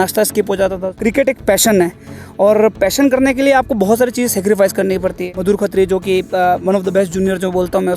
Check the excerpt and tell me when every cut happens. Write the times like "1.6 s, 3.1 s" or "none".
1.0 s, 5.3 s